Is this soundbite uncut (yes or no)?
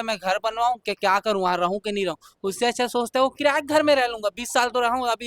yes